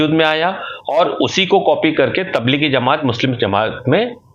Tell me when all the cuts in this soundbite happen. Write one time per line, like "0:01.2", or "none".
none